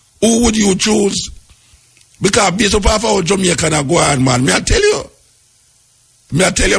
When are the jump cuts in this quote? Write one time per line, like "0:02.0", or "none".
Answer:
none